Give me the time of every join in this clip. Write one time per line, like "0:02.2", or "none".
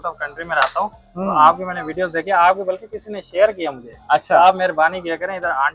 none